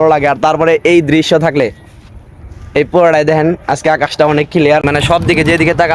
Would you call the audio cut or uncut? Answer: cut